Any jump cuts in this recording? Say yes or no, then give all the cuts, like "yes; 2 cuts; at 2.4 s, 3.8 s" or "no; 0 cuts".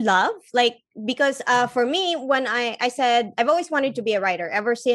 no; 0 cuts